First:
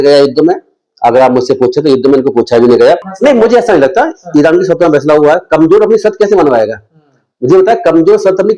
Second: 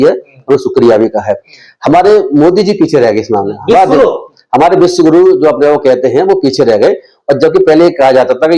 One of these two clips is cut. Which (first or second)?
first